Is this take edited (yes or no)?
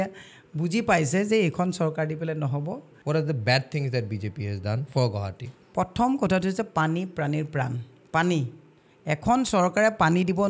yes